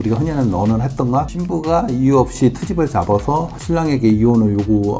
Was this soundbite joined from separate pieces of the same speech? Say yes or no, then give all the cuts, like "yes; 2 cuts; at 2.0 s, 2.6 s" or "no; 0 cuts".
no; 0 cuts